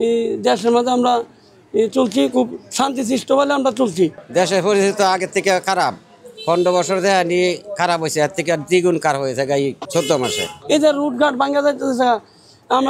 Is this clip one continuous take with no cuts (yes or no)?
no